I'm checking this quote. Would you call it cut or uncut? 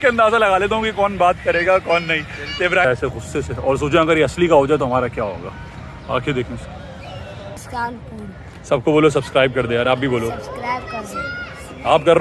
cut